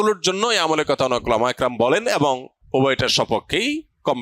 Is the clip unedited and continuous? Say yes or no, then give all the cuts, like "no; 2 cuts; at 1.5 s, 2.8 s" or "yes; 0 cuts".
no; 1 cut; at 2.5 s